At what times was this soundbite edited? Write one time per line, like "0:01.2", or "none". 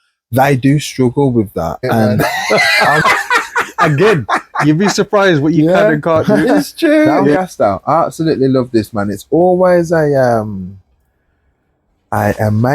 0:02.4
0:07.4

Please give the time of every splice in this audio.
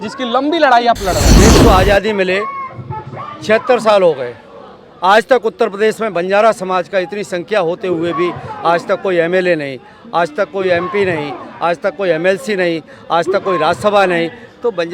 0:01.3

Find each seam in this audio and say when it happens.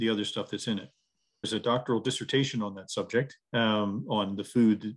0:01.5

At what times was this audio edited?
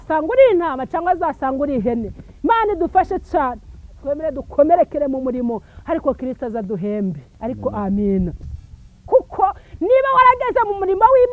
0:04.0
0:07.3

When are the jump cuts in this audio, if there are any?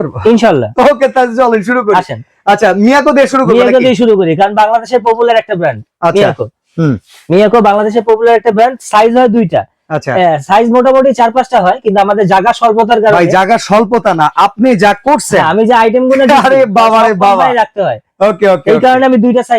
none

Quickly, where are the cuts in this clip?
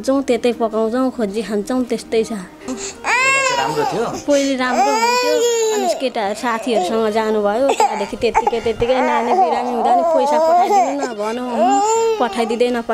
0:02.8

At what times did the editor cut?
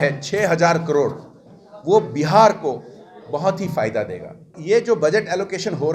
0:04.6

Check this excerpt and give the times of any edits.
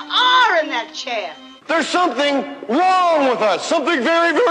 0:02.1

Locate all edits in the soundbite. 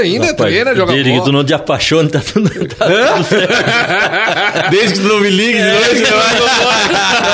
none

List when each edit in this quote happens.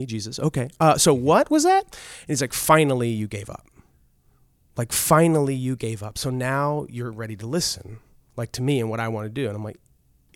none

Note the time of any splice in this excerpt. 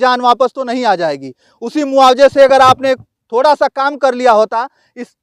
none

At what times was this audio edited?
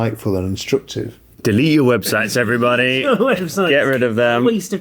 0:01.3

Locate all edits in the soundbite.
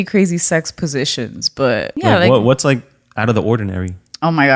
0:01.9

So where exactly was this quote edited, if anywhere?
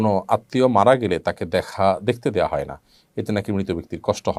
none

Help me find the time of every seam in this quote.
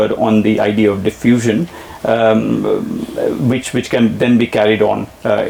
none

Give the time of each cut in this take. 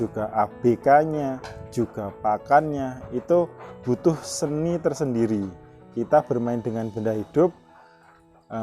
none

